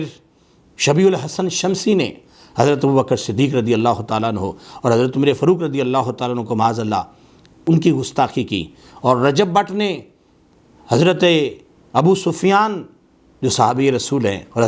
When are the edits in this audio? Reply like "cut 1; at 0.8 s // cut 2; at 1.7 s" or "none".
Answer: none